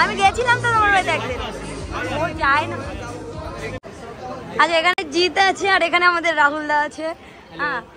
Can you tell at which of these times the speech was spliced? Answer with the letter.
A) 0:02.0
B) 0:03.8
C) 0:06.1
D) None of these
B